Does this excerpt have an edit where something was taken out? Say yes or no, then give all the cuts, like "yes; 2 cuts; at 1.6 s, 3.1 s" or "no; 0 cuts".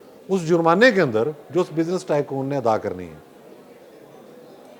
no; 0 cuts